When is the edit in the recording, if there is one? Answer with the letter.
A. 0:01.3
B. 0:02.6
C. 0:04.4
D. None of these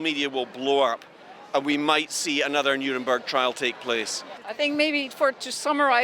C